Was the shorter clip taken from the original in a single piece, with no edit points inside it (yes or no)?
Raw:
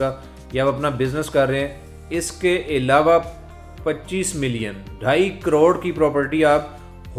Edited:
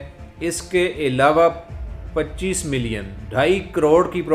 yes